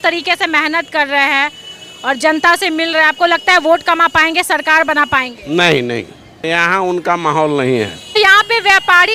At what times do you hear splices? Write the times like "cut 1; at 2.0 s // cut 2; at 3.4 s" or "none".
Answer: cut 1; at 6.3 s // cut 2; at 8.2 s